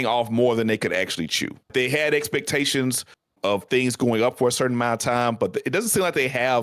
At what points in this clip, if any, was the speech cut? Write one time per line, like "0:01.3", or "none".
0:01.7
0:03.4